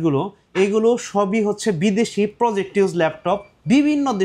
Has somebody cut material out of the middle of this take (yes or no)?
no